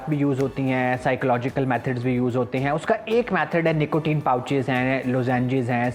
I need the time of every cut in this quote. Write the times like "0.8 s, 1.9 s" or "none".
none